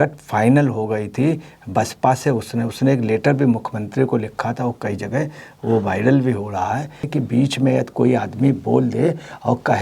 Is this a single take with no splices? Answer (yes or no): no